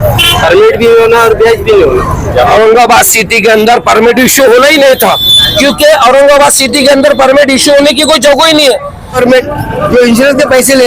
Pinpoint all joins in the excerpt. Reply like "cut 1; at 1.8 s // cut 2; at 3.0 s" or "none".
cut 1; at 2.5 s // cut 2; at 9.2 s

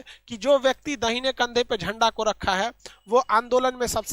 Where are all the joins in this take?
none

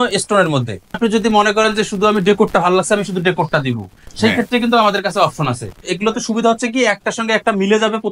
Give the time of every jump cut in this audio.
cut 1; at 1.0 s // cut 2; at 5.9 s

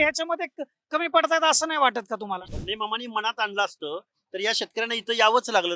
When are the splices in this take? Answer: cut 1; at 2.6 s

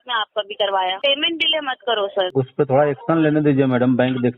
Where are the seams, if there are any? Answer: cut 1; at 0.9 s // cut 2; at 2.3 s

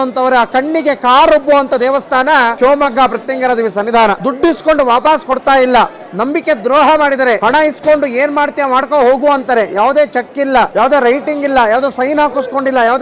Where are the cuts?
cut 1; at 2.5 s // cut 2; at 4.2 s // cut 3; at 7.4 s // cut 4; at 10.7 s

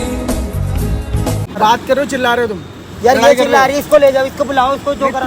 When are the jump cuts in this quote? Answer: cut 1; at 1.6 s

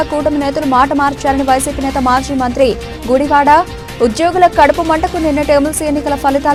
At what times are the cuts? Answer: none

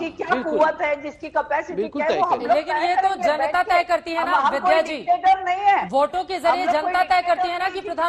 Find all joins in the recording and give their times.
none

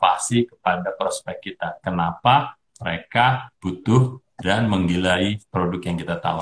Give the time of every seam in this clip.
cut 1; at 3.5 s // cut 2; at 5.4 s

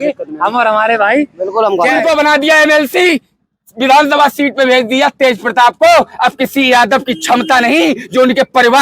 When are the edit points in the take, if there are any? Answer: cut 1; at 2.0 s

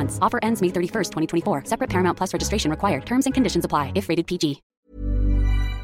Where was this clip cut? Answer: cut 1; at 4.7 s

